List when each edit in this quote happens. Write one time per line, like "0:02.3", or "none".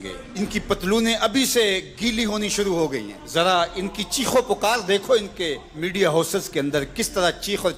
none